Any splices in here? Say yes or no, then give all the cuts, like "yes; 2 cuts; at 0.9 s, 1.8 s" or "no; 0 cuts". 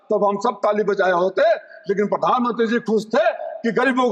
no; 0 cuts